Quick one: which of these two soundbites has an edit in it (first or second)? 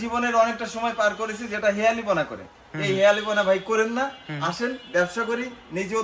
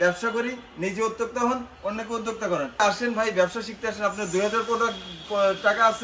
second